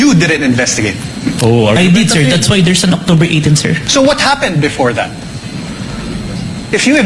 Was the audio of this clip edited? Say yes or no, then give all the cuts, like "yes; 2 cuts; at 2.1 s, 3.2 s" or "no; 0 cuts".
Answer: no; 0 cuts